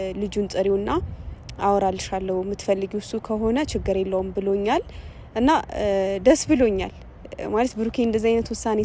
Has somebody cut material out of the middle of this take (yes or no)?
no